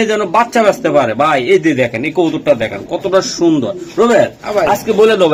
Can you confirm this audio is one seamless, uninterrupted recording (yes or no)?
yes